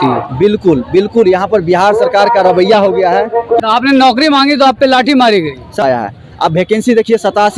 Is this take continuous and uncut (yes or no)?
no